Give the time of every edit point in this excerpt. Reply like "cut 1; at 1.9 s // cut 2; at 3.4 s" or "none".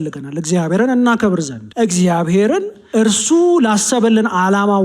cut 1; at 1.6 s // cut 2; at 2.8 s